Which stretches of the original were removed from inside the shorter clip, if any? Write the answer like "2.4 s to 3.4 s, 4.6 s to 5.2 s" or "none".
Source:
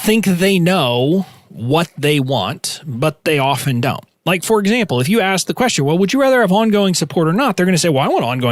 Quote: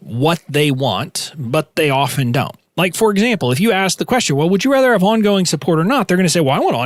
none